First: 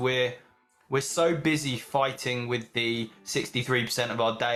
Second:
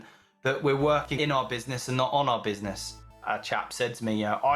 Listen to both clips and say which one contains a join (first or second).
second